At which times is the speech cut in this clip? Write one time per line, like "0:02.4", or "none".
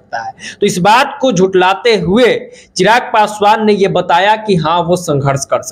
none